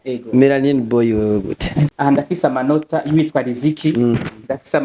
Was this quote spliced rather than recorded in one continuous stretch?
yes; 1 cut; at 1.9 s

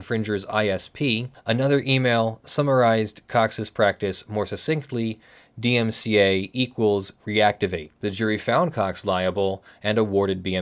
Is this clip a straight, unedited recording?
no; 2 cuts; at 1.3 s, 7.9 s

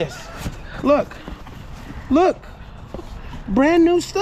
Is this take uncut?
yes; 0 cuts

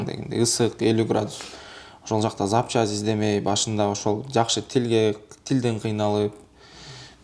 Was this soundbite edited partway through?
no; 0 cuts

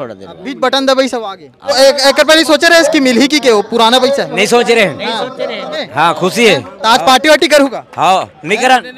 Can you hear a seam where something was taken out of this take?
yes; 2 cuts; at 1.7 s, 5.9 s

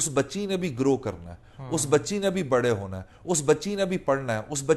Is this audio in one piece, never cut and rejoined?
yes; 0 cuts

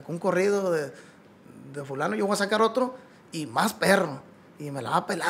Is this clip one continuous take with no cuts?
yes; 0 cuts

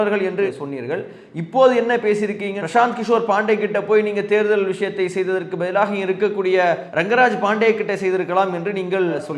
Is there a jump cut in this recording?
yes; 1 cut; at 6.9 s

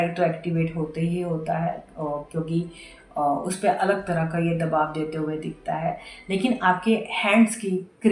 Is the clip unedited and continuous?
yes; 0 cuts

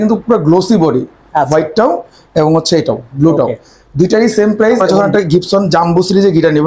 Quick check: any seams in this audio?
yes; 1 cut; at 4.8 s

